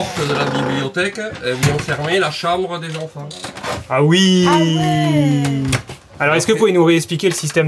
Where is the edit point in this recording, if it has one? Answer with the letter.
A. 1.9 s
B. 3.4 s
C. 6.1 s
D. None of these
C